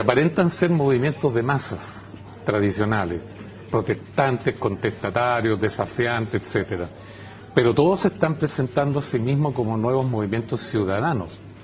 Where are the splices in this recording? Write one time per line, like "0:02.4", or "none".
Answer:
none